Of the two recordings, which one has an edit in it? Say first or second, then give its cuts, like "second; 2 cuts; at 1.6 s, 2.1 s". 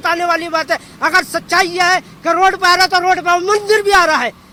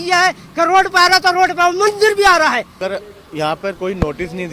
second; 1 cut; at 2.7 s